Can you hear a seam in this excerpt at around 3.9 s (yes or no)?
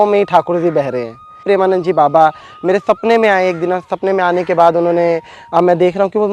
no